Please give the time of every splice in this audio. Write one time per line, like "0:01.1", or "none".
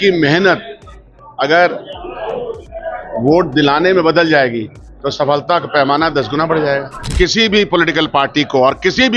0:07.0